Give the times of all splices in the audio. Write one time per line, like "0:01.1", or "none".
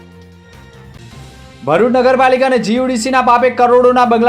0:00.9